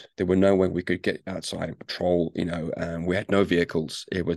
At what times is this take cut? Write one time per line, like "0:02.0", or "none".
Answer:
none